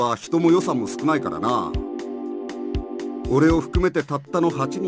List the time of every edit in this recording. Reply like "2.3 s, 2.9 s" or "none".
1.6 s, 3.3 s